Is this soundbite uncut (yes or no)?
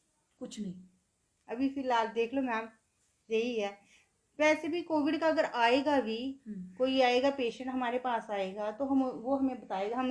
yes